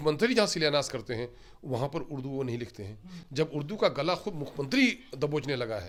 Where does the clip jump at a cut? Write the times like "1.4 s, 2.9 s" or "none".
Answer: none